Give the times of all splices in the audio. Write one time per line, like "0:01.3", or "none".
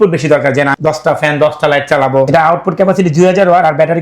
0:02.3